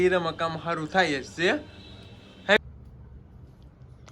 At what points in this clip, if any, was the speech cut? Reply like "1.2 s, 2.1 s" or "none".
2.6 s